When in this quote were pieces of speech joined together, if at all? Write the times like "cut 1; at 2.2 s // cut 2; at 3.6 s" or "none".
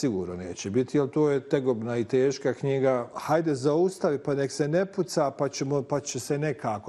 cut 1; at 3.2 s